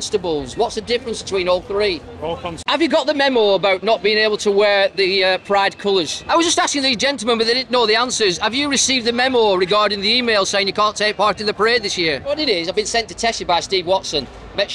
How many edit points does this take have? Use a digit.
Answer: 3